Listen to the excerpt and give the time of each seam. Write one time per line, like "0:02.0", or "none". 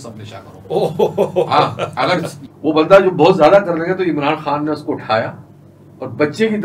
0:02.4